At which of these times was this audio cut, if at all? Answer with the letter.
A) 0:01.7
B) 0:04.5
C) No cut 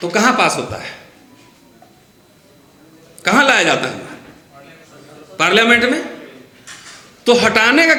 C